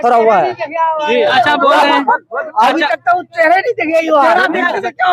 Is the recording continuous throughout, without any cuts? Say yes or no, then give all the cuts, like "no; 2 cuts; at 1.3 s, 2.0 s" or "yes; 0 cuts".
no; 1 cut; at 1.3 s